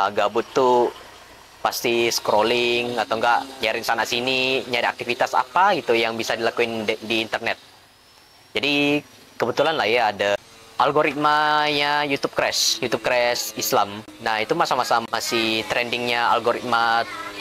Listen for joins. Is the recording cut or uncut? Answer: uncut